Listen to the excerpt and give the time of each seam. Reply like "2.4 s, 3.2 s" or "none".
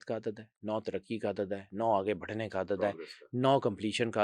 none